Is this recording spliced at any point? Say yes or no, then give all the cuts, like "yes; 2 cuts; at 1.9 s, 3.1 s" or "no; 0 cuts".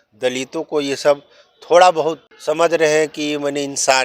yes; 1 cut; at 2.3 s